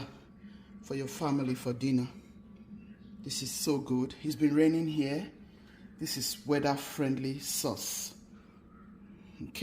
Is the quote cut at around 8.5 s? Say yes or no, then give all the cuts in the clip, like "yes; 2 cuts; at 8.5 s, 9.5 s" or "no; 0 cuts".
no; 0 cuts